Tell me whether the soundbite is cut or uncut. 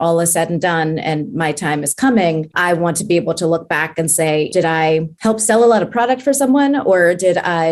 cut